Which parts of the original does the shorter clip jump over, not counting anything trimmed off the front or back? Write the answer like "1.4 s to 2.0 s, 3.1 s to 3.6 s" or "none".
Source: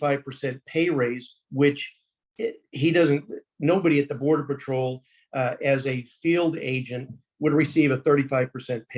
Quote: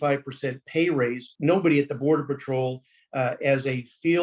1.3 s to 3.5 s